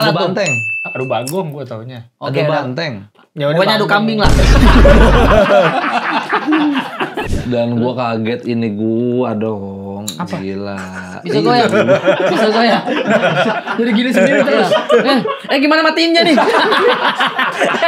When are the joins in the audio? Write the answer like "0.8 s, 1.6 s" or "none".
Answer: 7.3 s